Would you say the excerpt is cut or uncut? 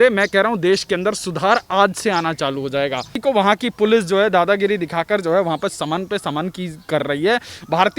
cut